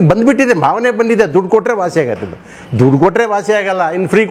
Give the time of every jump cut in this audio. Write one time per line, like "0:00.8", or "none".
none